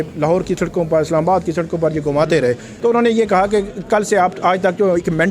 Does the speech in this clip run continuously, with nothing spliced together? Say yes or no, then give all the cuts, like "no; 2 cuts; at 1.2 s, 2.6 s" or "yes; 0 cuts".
no; 1 cut; at 2.7 s